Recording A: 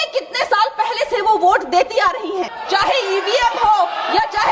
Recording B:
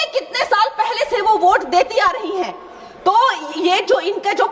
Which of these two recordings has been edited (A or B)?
A